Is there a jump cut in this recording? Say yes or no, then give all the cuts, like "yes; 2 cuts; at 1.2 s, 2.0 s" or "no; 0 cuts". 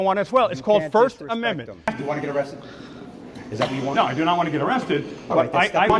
no; 0 cuts